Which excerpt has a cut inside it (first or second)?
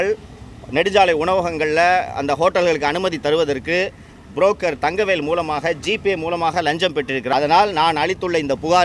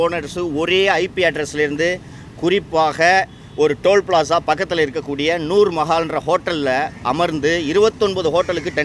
first